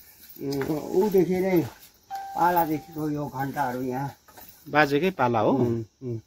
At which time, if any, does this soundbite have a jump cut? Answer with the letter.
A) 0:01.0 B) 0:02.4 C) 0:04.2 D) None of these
D